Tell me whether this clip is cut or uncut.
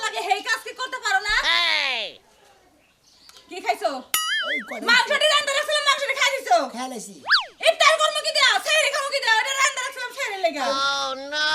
cut